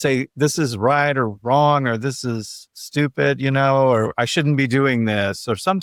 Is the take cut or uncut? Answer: uncut